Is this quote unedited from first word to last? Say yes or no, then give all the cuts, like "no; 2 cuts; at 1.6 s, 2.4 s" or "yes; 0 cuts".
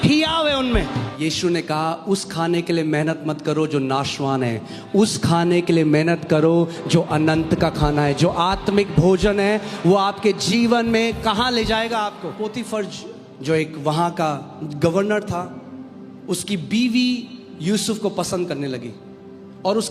no; 2 cuts; at 1.1 s, 12.4 s